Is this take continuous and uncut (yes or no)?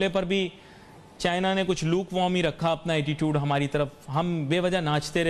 yes